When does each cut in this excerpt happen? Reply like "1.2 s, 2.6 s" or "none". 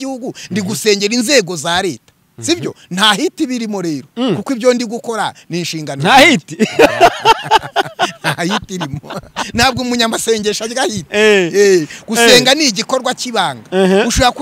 none

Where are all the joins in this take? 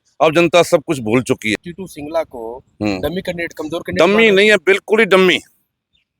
1.6 s

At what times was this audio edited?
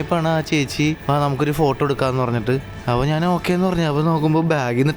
1.0 s, 2.7 s

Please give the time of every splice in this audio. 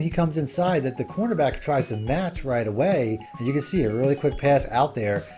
3.3 s

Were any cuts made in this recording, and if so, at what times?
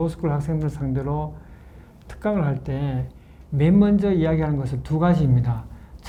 none

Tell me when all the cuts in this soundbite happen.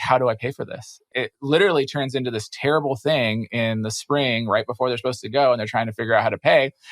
0.9 s

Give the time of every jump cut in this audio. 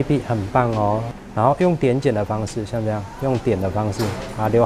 1.2 s

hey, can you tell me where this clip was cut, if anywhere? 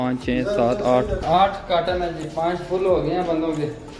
1.1 s

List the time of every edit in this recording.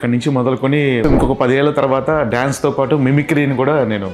1.0 s

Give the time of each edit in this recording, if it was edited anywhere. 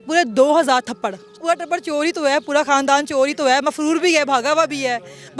1.4 s

